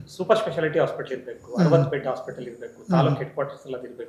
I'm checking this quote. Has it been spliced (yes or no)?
no